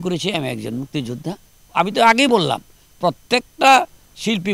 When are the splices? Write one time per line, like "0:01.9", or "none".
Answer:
0:01.5

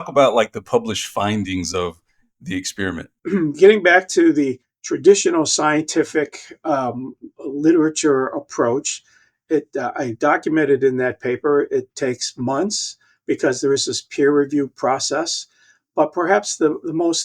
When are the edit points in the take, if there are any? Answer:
0:03.1

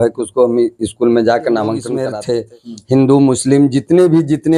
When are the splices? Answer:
0:01.9

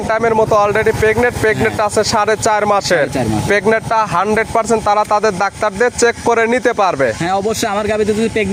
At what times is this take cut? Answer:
none

